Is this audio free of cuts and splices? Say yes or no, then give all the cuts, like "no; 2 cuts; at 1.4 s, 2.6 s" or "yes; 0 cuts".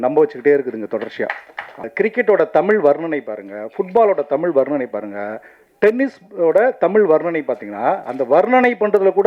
no; 1 cut; at 1.8 s